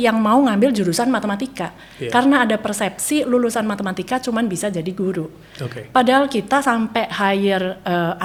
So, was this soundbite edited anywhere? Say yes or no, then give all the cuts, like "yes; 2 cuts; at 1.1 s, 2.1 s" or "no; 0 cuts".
no; 0 cuts